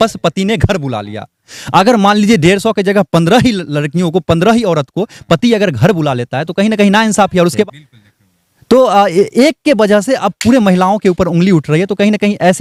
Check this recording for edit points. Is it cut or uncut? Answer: uncut